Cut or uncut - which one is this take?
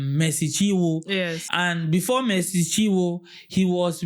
cut